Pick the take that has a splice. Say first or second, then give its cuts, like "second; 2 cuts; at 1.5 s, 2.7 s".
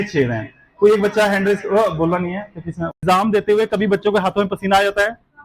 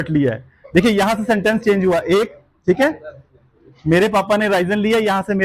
first; 1 cut; at 3.0 s